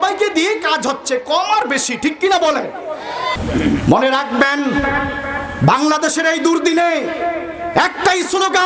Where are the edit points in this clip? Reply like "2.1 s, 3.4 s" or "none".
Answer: 3.4 s